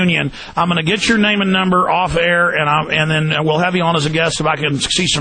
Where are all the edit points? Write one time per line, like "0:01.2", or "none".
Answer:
0:01.2